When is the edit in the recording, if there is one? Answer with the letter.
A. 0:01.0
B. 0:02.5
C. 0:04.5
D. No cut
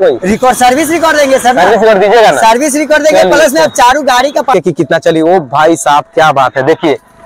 C